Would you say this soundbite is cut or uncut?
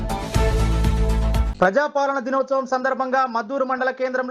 cut